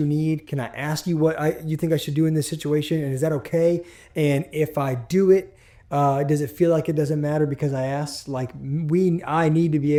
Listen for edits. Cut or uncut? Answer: uncut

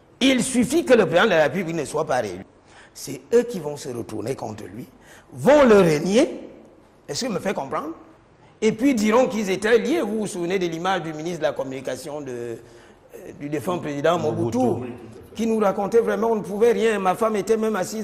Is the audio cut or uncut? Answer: uncut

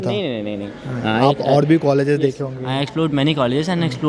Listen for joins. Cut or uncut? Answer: uncut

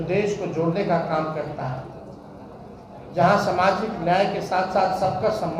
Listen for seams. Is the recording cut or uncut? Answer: uncut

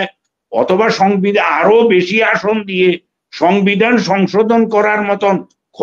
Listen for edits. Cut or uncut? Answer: uncut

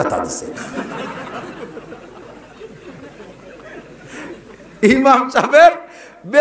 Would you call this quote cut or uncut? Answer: uncut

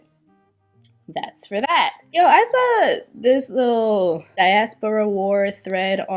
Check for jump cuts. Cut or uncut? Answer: cut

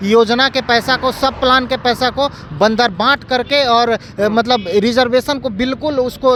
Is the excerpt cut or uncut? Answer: uncut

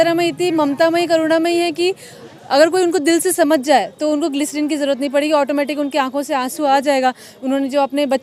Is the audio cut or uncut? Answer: uncut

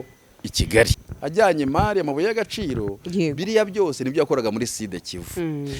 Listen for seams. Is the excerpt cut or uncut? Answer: cut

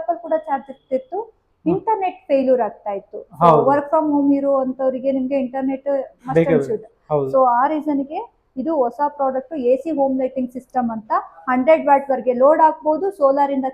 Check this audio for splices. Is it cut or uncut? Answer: uncut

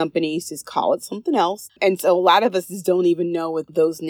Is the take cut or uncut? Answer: cut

